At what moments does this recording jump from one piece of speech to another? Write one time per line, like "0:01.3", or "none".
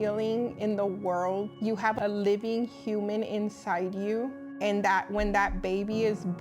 0:01.7
0:04.4